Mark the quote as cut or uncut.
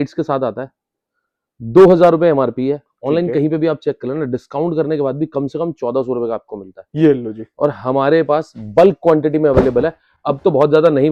uncut